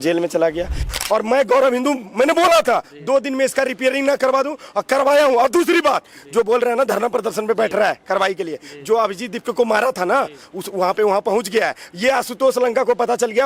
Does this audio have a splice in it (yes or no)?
yes